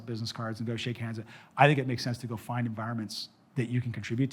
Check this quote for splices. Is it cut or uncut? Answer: uncut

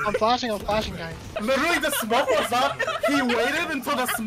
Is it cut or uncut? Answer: cut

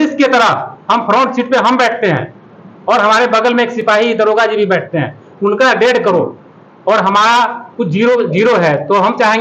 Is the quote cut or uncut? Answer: uncut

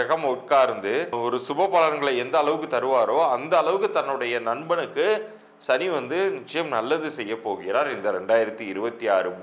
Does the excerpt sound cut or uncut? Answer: cut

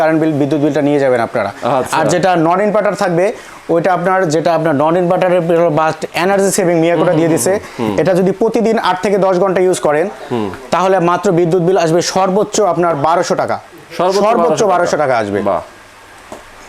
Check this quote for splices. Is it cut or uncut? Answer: uncut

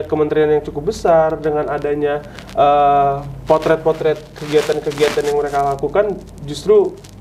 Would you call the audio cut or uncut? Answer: uncut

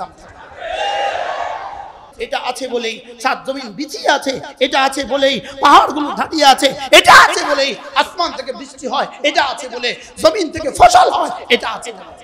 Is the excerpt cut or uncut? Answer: cut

